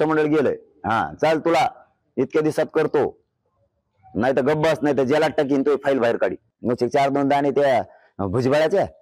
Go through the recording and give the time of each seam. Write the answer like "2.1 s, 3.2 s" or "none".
6.5 s